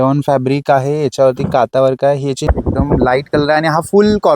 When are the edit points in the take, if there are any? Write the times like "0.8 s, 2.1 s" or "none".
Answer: 2.4 s